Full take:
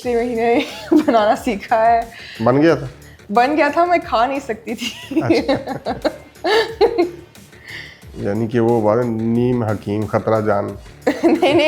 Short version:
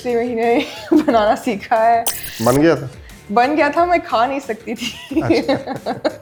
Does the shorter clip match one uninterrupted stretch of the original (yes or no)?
yes